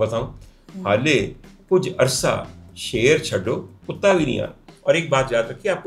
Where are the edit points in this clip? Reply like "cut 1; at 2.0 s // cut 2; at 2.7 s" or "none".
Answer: cut 1; at 4.6 s